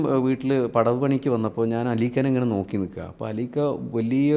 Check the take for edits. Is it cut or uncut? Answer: uncut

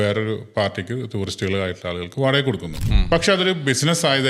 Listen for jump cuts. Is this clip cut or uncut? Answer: cut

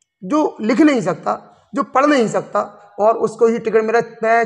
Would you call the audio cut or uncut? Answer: cut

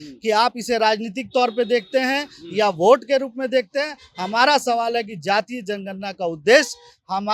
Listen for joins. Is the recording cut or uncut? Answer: uncut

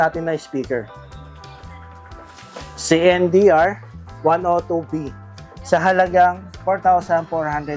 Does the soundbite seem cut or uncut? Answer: uncut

